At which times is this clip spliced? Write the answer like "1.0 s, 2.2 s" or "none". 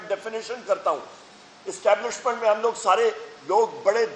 1.2 s